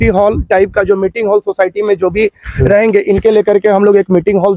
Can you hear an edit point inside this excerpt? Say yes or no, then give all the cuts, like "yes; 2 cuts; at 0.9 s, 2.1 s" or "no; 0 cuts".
no; 0 cuts